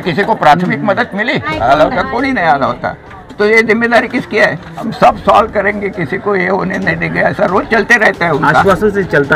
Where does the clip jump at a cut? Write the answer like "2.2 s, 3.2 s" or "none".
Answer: 1.5 s, 4.9 s